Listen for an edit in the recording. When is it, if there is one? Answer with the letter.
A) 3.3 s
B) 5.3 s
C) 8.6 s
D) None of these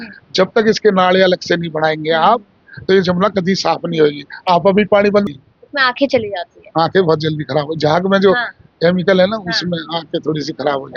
B